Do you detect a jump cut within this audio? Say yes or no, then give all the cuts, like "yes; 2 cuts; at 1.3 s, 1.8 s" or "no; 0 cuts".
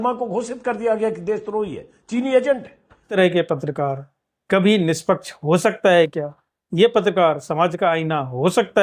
yes; 1 cut; at 3.2 s